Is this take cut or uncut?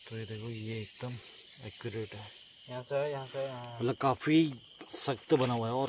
uncut